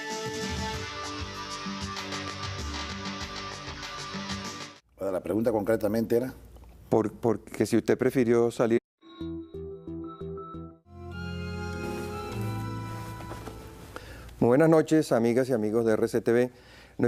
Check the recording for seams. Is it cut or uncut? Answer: uncut